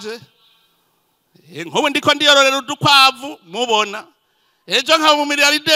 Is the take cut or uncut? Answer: uncut